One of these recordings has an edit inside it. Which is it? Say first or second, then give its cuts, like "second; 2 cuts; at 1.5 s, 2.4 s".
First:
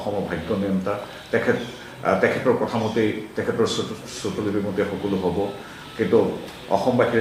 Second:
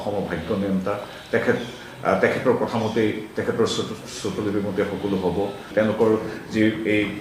second; 1 cut; at 5.6 s